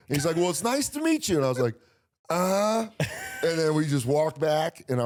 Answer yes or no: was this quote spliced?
no